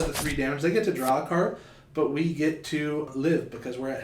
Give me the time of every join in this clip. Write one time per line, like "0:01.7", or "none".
0:03.1

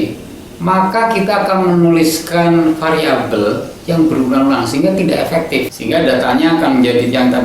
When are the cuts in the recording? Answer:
0:05.8

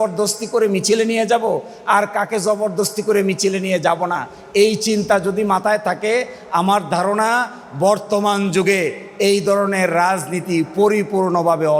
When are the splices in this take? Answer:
none

